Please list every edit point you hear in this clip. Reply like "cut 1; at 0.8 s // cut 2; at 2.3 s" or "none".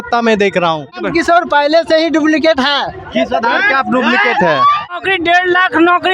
cut 1; at 0.9 s // cut 2; at 4.9 s